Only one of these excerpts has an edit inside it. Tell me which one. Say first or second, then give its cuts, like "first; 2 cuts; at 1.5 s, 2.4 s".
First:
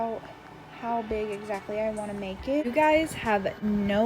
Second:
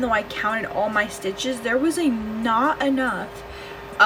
first; 1 cut; at 2.6 s